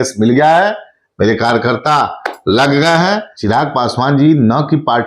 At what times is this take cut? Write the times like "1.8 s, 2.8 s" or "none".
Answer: 3.3 s